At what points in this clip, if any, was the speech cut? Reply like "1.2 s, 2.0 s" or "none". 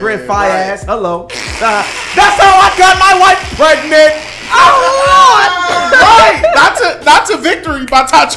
none